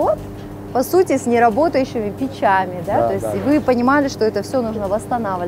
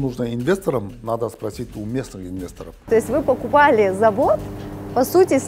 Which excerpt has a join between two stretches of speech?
second; 1 cut; at 2.8 s

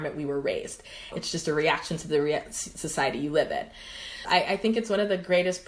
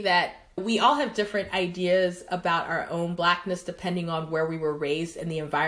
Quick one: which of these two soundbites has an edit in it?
first; 2 cuts; at 1.1 s, 4.2 s

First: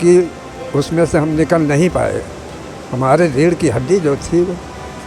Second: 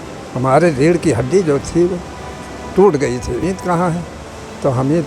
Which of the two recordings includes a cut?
second; 1 cut; at 3.4 s

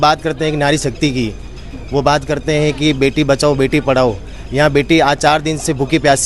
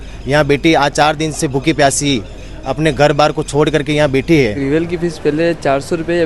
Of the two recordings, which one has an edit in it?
second; 1 cut; at 4.6 s

